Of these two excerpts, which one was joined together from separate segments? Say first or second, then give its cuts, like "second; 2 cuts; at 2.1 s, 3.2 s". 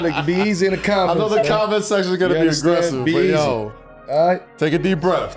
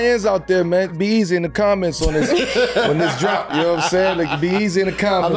second; 1 cut; at 1.0 s